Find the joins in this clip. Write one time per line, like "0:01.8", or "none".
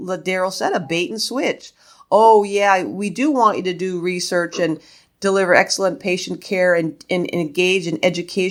none

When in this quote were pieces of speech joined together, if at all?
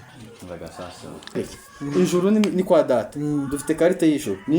0:01.4

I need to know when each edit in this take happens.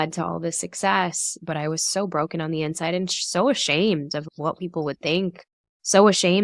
none

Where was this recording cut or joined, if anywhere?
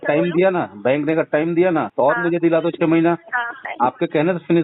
0:01.9
0:03.6

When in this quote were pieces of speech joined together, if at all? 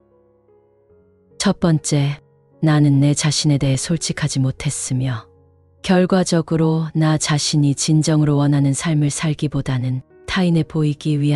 0:01.4

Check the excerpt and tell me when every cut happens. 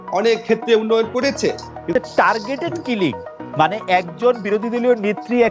0:01.9

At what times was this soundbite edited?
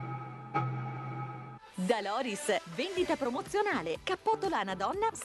0:01.4

